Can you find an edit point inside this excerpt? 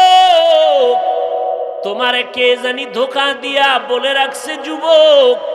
yes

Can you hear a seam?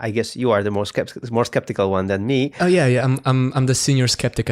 yes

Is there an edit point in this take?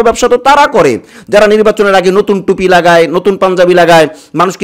no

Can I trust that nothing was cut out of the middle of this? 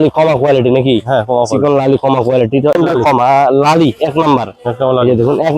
no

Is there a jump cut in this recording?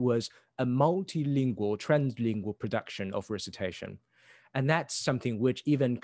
no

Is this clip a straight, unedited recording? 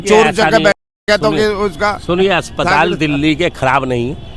yes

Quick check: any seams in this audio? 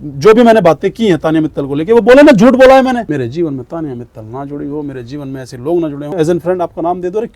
yes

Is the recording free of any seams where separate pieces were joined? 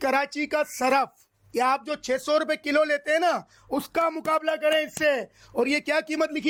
yes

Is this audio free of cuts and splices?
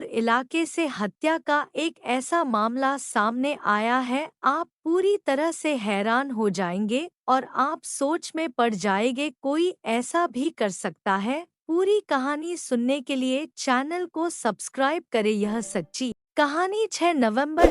no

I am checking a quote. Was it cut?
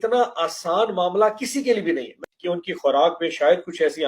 yes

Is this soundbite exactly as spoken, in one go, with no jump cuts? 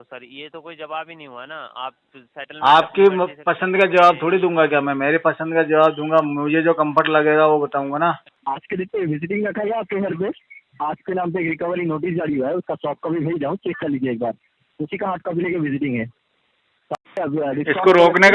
no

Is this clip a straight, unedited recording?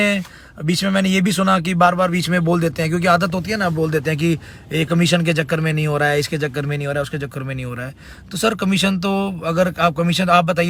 yes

